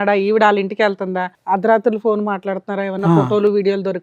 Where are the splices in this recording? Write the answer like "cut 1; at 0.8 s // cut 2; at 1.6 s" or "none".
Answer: cut 1; at 1.3 s